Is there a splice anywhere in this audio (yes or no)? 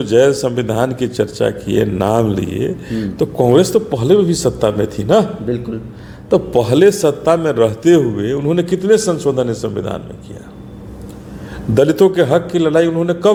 no